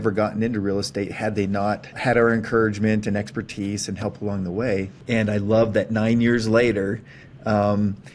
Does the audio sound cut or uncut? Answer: cut